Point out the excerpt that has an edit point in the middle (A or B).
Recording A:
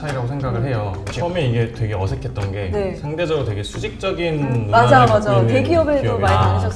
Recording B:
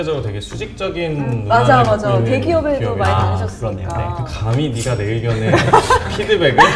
A